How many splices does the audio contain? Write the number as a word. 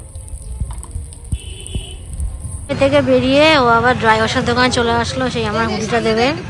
two